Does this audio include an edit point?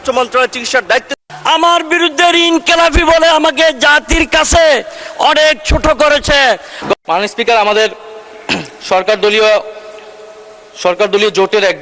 yes; 2 cuts; at 1.2 s, 6.9 s

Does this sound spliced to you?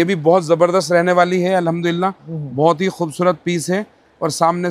no; 0 cuts

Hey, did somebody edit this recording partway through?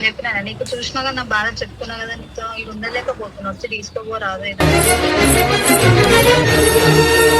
no; 0 cuts

